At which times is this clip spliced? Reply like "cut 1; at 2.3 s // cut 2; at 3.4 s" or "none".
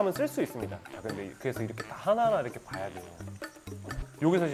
cut 1; at 0.9 s // cut 2; at 3.2 s